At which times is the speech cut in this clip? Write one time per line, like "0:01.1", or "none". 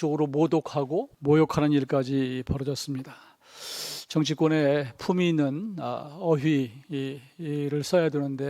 0:01.1